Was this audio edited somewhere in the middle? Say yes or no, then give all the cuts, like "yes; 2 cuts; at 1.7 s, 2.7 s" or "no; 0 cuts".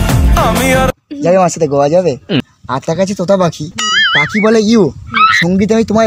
yes; 1 cut; at 2.4 s